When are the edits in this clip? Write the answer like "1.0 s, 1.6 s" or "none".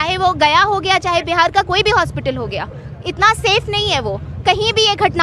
none